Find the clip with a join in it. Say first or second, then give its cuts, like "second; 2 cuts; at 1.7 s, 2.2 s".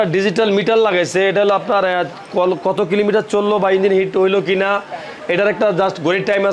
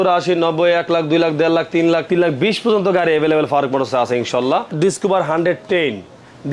second; 2 cuts; at 2.0 s, 4.7 s